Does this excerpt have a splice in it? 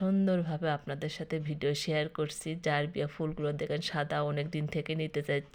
no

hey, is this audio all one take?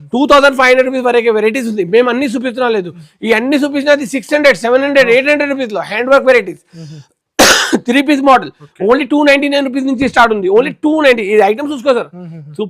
yes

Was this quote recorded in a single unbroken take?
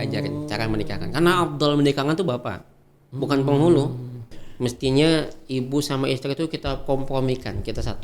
no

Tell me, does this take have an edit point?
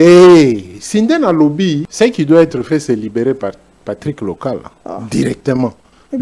yes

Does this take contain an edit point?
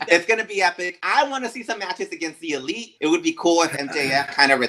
yes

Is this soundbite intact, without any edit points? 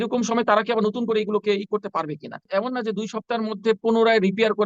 no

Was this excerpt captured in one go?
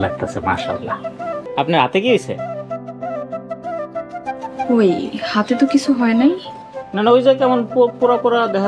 no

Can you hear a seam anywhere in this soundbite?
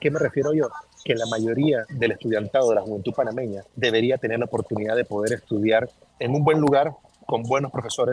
yes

